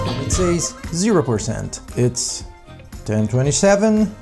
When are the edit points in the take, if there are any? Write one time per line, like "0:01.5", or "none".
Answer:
none